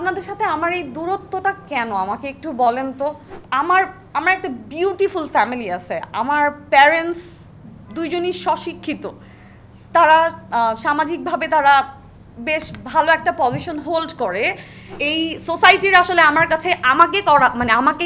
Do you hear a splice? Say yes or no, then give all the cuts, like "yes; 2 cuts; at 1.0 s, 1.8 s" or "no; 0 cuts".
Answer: yes; 2 cuts; at 3.3 s, 15.0 s